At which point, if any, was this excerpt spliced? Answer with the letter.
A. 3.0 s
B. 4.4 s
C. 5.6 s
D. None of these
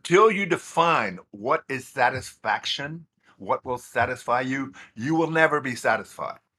D